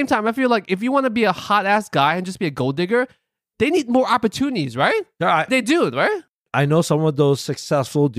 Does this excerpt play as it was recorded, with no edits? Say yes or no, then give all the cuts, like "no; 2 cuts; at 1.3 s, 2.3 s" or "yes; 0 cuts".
yes; 0 cuts